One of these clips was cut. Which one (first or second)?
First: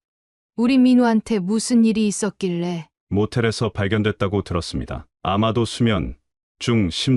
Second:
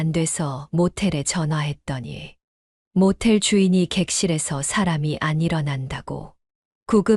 first